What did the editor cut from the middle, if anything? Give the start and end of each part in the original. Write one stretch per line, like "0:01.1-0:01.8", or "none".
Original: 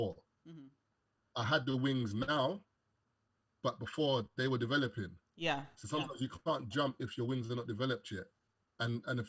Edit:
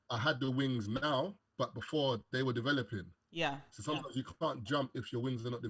0:02.7-0:03.5